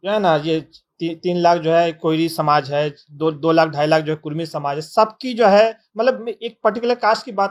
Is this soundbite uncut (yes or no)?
yes